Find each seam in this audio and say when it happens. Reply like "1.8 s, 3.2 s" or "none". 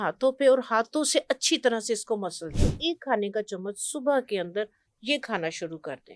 2.5 s